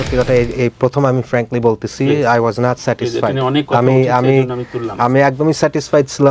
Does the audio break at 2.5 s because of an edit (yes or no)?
no